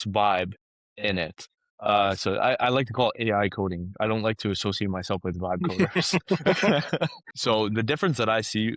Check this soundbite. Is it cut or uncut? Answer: cut